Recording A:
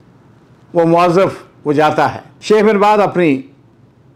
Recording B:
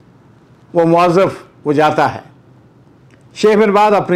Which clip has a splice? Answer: A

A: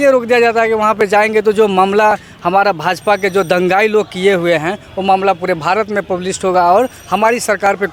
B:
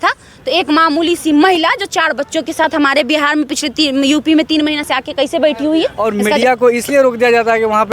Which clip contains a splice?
B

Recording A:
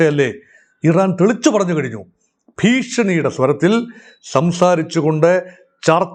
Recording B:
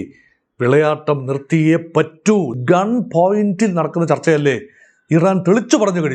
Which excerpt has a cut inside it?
B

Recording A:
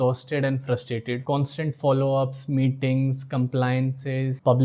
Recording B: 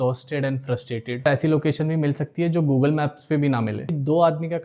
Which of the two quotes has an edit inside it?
B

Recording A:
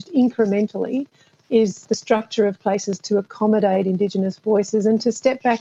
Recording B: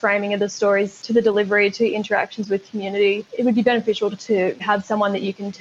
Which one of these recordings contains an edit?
B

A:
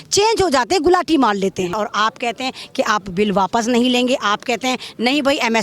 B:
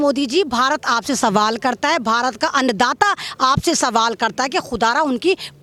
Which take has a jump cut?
A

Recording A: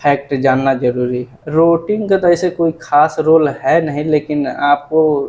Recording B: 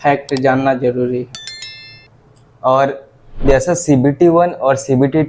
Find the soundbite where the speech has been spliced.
A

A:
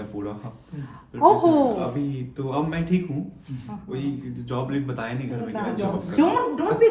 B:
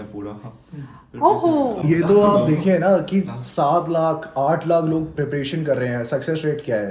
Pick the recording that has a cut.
B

